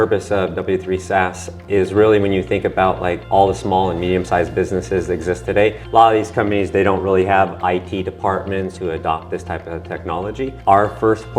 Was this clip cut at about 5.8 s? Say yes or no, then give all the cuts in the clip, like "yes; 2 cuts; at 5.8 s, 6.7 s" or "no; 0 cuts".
yes; 5 cuts; at 3.2 s, 5.8 s, 7.6 s, 8.7 s, 10.5 s